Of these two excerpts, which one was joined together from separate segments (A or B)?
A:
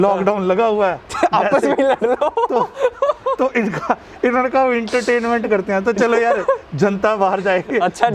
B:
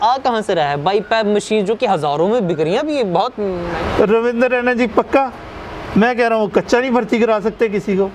B